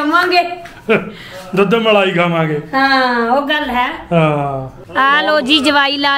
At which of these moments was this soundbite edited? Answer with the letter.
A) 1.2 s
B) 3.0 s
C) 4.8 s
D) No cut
C